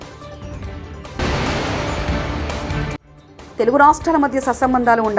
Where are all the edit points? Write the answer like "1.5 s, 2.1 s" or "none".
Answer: 1.2 s, 3.0 s